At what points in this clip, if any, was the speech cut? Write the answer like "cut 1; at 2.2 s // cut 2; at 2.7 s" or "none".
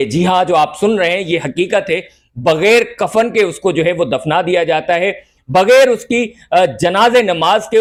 none

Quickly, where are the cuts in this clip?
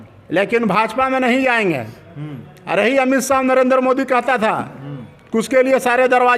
none

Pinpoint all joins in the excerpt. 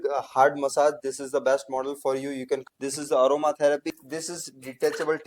cut 1; at 2.6 s // cut 2; at 3.9 s

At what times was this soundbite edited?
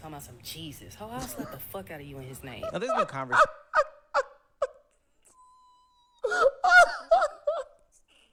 none

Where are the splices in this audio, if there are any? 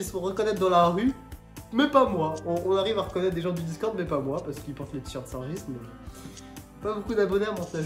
none

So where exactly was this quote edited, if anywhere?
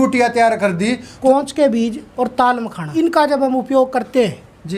cut 1; at 1.1 s // cut 2; at 2.0 s // cut 3; at 2.9 s

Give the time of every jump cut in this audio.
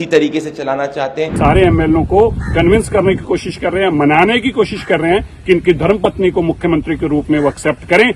cut 1; at 1.4 s

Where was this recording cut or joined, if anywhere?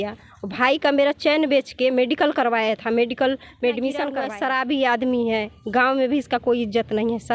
cut 1; at 4.3 s

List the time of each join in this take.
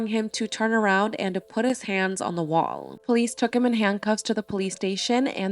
cut 1; at 2.9 s

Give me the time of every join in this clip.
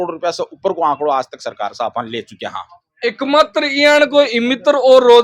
none

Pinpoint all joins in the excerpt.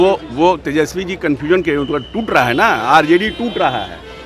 none

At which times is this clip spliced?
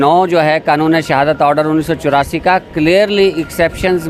none

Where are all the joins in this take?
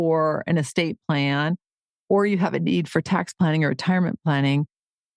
none

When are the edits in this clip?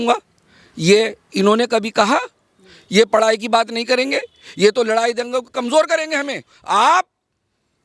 cut 1; at 6.5 s

